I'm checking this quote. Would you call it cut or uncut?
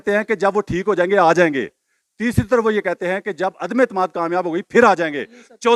uncut